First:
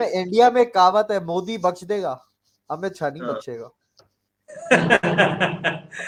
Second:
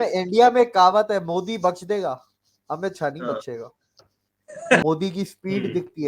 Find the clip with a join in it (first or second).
second